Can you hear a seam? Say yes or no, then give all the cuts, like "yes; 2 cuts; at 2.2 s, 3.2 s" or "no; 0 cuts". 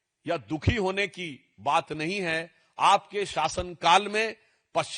no; 0 cuts